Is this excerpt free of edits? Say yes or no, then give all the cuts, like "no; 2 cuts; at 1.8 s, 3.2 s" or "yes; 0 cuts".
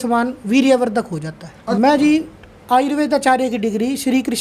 no; 1 cut; at 1.8 s